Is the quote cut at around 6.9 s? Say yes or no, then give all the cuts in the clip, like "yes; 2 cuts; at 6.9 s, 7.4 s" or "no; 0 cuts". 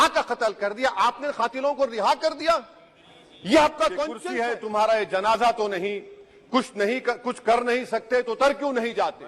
no; 1 cut; at 4.2 s